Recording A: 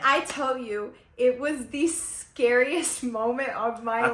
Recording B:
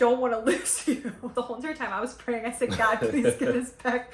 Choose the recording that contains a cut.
B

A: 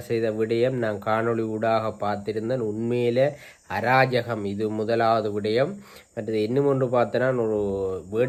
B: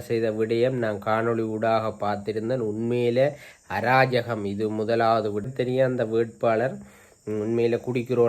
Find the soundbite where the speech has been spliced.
B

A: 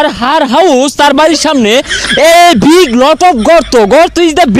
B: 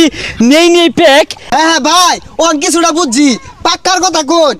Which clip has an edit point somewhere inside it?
B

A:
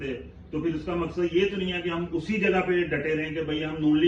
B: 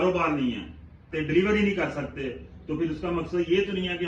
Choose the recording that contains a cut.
B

